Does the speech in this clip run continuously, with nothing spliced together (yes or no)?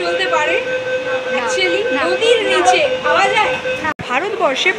yes